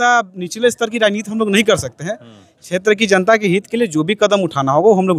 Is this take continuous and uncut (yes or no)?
yes